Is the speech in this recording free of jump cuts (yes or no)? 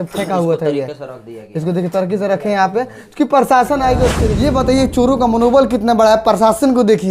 no